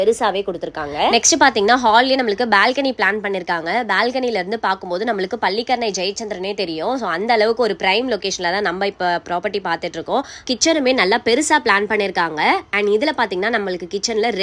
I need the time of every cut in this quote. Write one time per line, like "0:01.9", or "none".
0:10.5